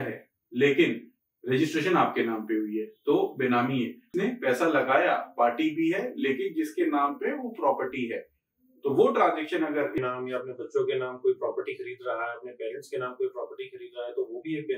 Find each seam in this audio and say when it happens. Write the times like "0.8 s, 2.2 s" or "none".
4.0 s, 10.0 s